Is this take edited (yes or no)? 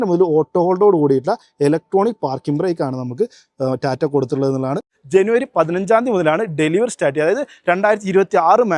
yes